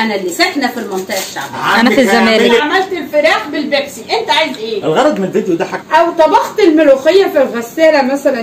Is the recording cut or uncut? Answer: cut